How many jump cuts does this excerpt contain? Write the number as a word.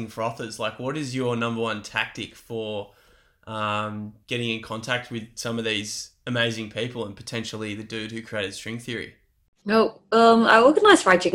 zero